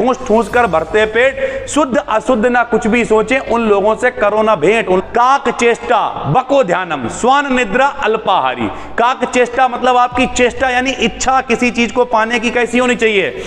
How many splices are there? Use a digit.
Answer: 1